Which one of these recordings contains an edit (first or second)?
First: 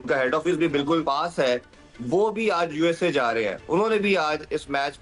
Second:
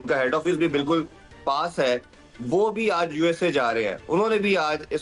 first